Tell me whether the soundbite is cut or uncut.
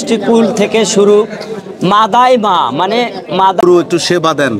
cut